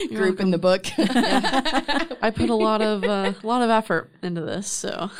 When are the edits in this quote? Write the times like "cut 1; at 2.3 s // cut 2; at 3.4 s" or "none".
cut 1; at 2.1 s